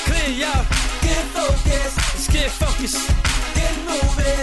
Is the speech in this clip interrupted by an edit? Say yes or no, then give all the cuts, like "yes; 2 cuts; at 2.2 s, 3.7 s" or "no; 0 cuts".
no; 0 cuts